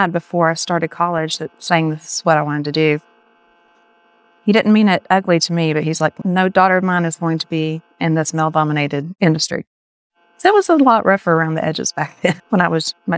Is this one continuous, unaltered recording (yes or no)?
yes